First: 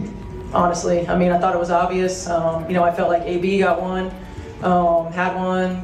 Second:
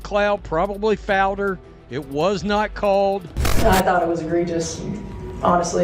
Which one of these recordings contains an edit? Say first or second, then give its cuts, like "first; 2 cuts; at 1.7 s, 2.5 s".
second; 1 cut; at 3.4 s